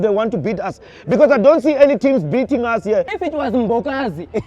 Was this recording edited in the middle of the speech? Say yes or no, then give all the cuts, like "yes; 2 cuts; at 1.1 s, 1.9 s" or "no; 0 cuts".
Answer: yes; 1 cut; at 3.2 s